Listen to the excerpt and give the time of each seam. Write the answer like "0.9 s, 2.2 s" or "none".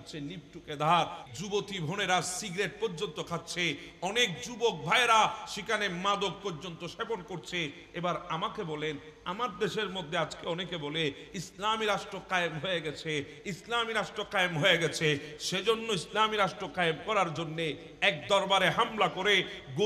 1.2 s